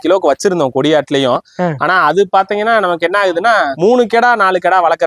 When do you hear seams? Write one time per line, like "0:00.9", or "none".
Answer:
none